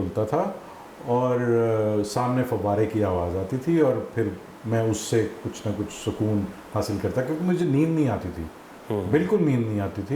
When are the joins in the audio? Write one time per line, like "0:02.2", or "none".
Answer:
none